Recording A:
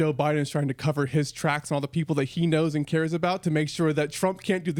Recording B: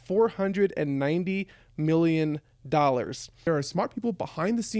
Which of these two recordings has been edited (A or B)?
B